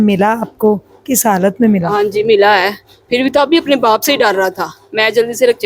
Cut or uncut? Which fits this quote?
uncut